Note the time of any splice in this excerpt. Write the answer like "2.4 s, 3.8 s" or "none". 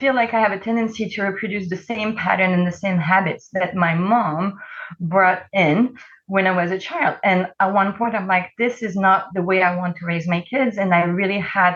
none